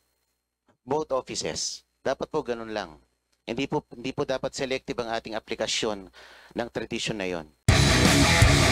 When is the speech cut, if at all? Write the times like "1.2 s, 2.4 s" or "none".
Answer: 7.5 s